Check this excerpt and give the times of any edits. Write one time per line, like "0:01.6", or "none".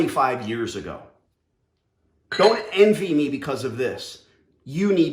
none